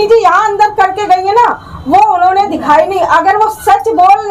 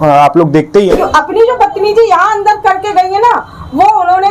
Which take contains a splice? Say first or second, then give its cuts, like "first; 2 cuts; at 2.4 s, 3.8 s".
second; 1 cut; at 0.9 s